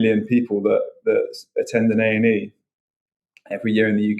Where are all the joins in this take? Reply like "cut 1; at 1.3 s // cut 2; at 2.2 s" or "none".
none